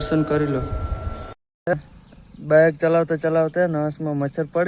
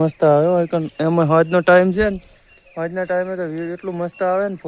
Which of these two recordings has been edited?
first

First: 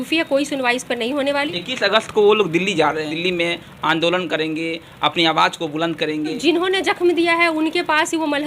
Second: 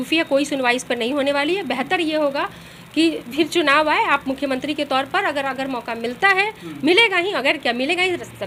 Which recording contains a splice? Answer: first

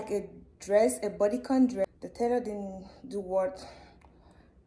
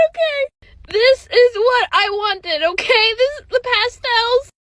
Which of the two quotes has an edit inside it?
first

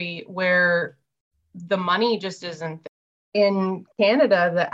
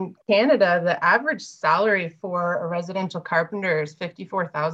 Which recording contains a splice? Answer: first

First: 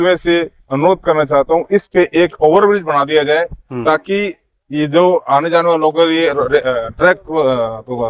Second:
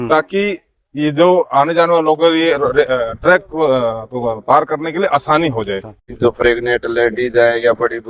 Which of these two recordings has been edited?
second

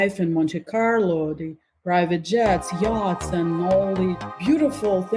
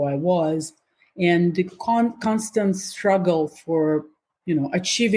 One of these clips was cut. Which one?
first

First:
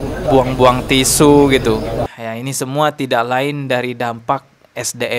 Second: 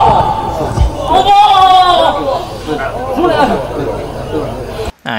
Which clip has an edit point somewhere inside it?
first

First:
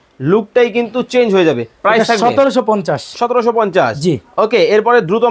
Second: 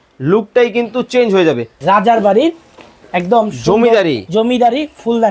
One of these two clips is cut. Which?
second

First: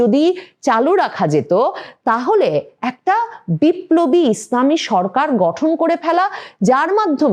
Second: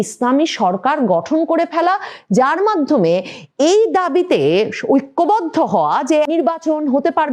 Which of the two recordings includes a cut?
second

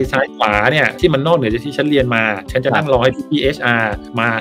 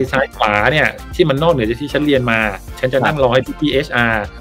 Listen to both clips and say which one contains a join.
first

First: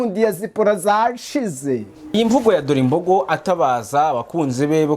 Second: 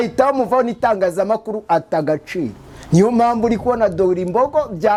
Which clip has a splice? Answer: first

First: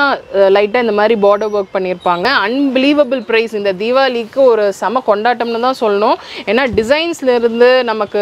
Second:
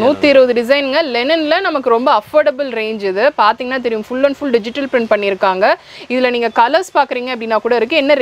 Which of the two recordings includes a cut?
first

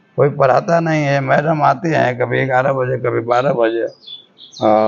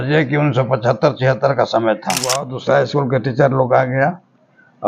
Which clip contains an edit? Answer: second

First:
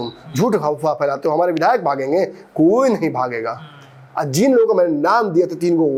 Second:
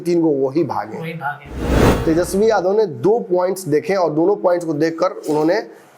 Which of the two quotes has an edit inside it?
second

